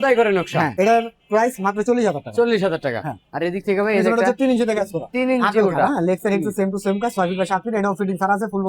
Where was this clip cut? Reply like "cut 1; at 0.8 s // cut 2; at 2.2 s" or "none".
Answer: none